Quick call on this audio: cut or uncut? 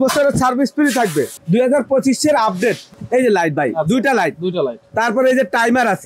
cut